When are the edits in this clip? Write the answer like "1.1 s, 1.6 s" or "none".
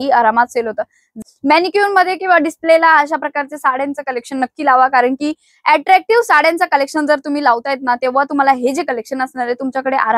1.1 s